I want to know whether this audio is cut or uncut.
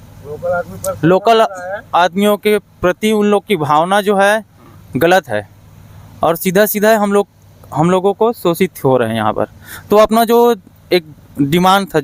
uncut